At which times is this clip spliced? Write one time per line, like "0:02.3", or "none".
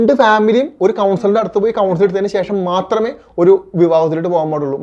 none